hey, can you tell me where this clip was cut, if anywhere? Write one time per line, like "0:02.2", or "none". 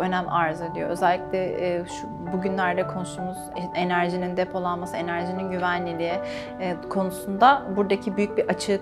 none

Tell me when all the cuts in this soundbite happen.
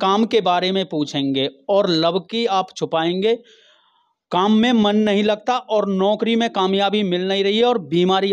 none

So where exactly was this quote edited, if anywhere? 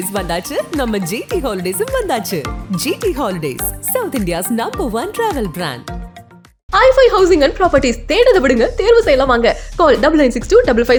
none

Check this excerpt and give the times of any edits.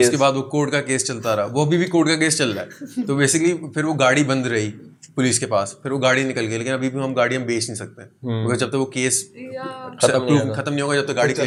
none

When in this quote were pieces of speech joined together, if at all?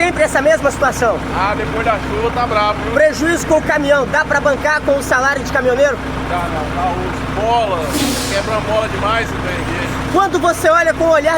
none

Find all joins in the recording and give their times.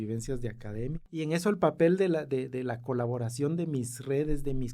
0:01.3

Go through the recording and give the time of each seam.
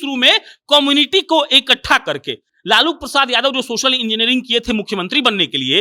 none

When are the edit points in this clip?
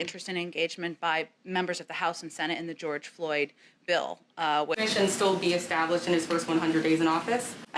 0:04.7

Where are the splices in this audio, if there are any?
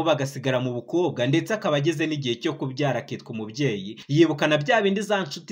0:03.9

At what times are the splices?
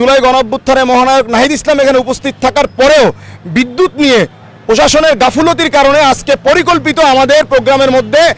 none

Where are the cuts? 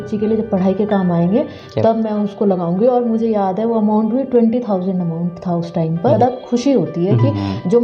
0:06.2

